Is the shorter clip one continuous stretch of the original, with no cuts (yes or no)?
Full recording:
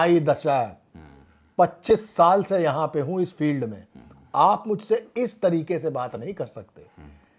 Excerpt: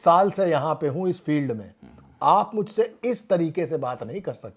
yes